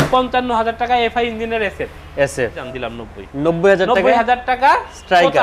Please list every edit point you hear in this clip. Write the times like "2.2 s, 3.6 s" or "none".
2.5 s